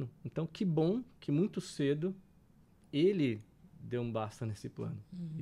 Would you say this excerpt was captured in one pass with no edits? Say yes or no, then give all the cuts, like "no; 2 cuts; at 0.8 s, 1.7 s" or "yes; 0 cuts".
yes; 0 cuts